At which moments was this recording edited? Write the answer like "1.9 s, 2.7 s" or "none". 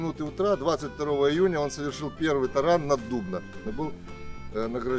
3.7 s